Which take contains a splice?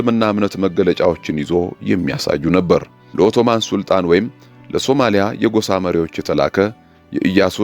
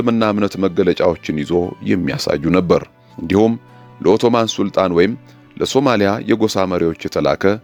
first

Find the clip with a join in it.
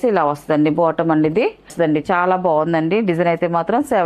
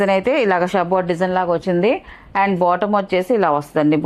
first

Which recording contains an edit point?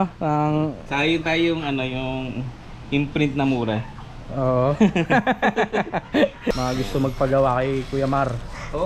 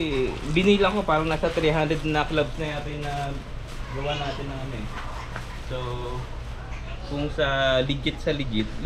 first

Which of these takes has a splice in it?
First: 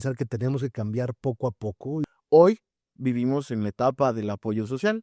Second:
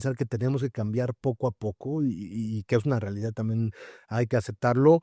first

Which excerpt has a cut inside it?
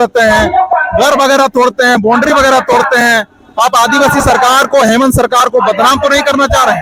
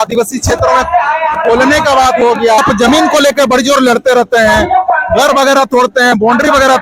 second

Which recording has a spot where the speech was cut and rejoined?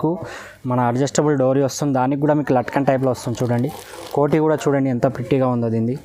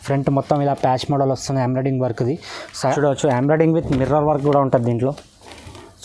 second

